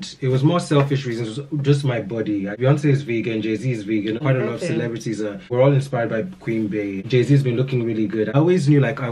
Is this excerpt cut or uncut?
cut